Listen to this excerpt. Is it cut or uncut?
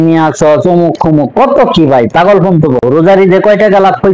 cut